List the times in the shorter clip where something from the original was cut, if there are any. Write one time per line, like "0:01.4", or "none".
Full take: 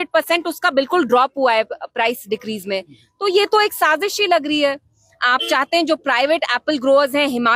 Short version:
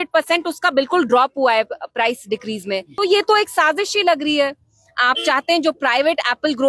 0:02.9